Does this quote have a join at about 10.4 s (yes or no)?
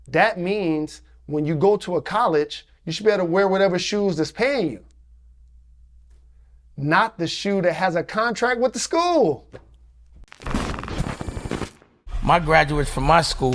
yes